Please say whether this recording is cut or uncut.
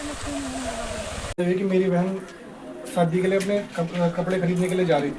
cut